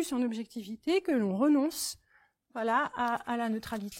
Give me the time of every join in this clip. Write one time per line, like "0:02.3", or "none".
none